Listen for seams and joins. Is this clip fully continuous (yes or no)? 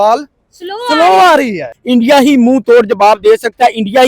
no